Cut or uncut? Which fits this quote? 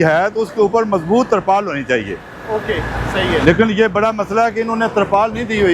uncut